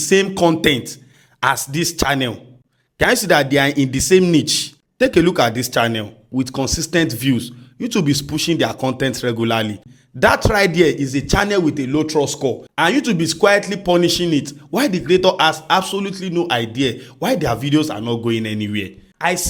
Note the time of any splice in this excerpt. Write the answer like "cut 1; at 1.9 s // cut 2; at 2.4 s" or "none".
none